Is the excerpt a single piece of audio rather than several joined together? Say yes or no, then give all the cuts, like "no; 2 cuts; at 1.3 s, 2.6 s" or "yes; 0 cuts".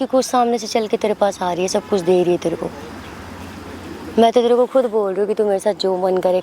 yes; 0 cuts